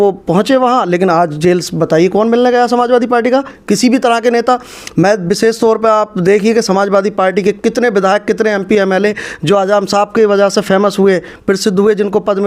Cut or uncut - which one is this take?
uncut